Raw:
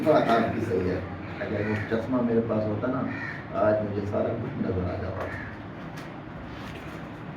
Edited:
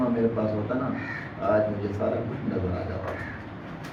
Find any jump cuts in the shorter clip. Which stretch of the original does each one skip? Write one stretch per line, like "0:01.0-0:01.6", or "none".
none